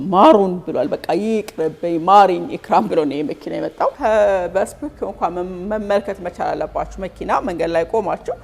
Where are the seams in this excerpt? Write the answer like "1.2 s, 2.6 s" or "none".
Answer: 4.0 s